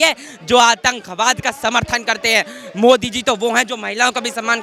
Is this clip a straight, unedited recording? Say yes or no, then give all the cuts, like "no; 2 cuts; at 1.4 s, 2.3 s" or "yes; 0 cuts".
yes; 0 cuts